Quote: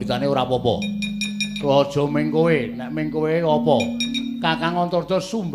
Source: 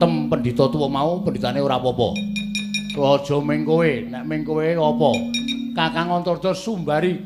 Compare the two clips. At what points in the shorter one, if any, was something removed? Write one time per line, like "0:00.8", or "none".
none